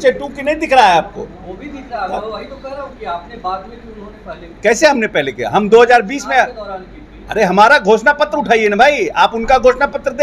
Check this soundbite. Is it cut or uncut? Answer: uncut